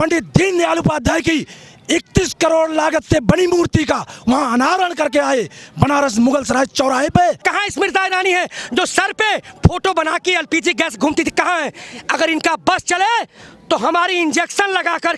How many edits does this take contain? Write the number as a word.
one